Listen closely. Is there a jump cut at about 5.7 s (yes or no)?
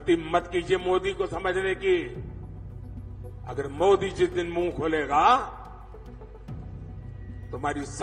yes